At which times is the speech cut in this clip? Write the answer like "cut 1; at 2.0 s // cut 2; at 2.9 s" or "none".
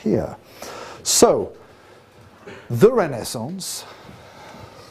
none